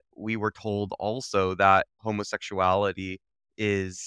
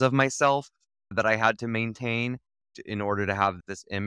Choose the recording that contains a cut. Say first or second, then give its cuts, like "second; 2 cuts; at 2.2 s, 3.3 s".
second; 1 cut; at 1.1 s